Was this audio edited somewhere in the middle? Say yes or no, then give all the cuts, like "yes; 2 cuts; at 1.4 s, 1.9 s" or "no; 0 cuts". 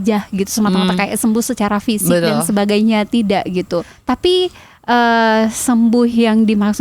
yes; 1 cut; at 3.9 s